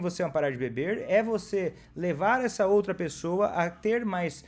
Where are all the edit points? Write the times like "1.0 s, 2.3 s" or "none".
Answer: none